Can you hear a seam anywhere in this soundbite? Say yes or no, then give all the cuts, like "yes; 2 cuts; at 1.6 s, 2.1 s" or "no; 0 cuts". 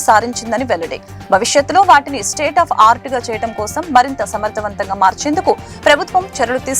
no; 0 cuts